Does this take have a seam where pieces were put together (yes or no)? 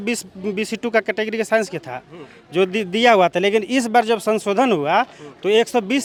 no